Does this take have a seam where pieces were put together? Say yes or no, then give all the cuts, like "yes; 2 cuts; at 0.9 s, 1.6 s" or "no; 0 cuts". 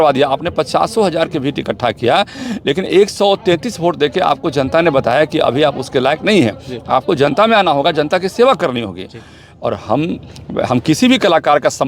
no; 0 cuts